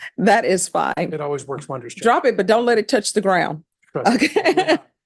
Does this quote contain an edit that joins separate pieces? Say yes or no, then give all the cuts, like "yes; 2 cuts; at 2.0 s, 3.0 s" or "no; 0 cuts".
no; 0 cuts